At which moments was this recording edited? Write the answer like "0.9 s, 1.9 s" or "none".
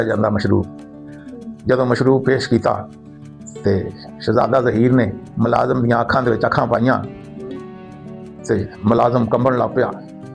none